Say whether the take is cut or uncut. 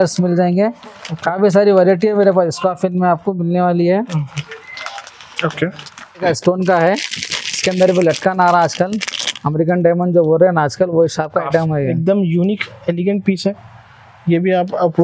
cut